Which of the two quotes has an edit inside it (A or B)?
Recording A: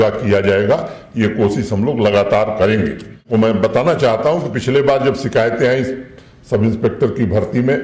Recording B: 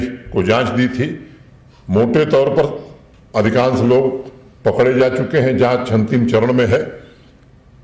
A